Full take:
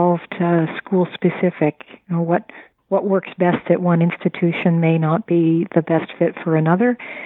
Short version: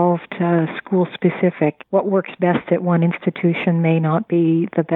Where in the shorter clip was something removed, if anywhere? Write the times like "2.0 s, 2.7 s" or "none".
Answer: 1.8 s